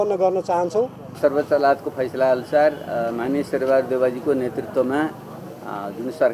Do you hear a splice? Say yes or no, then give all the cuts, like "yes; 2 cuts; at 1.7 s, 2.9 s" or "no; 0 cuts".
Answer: yes; 1 cut; at 1.0 s